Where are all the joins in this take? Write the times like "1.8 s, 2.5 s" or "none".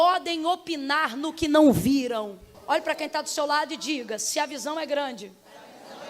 2.6 s